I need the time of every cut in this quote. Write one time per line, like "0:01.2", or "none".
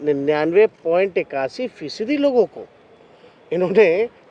none